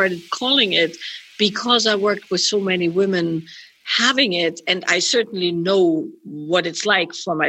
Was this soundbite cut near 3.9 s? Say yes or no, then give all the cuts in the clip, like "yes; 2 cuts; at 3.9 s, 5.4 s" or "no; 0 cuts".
no; 0 cuts